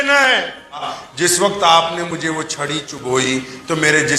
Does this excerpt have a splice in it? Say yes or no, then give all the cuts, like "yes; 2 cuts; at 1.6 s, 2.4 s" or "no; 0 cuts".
yes; 1 cut; at 1.0 s